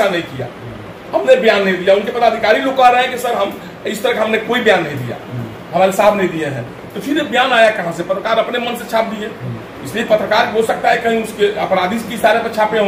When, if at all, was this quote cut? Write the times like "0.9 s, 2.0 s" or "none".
none